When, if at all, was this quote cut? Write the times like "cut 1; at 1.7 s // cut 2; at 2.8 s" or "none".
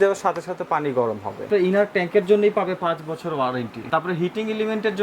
cut 1; at 1.5 s // cut 2; at 3.8 s